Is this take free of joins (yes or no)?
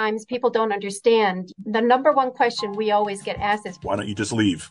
yes